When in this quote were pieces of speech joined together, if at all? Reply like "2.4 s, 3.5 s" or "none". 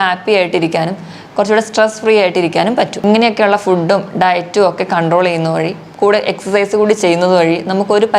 none